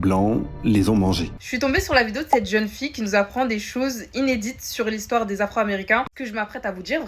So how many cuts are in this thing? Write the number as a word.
two